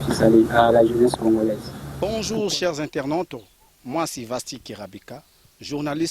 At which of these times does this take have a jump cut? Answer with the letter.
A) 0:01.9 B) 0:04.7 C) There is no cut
A